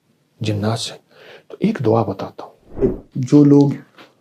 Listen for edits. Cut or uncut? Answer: cut